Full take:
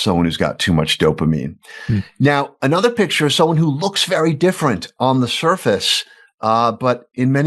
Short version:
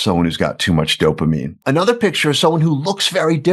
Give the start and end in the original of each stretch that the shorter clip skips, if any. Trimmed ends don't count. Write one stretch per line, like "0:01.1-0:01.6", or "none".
0:01.6-0:02.5